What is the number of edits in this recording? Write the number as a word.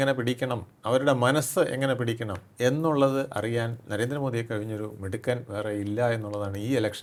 zero